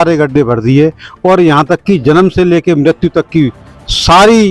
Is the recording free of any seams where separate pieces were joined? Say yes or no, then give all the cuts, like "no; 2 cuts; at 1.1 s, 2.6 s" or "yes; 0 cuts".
yes; 0 cuts